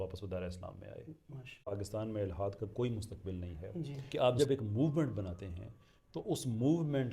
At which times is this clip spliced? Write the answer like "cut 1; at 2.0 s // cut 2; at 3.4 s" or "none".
cut 1; at 1.7 s // cut 2; at 4.0 s